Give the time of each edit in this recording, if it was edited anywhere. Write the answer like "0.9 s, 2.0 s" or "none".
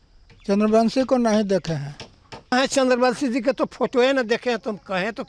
2.5 s